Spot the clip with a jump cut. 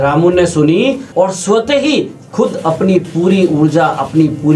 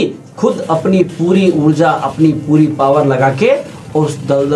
first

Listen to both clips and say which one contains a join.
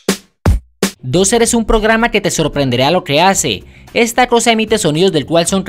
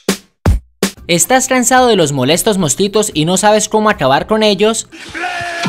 first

